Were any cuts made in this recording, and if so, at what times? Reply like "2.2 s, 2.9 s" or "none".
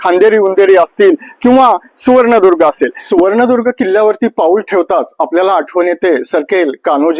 3.0 s